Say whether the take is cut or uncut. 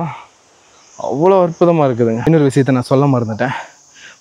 cut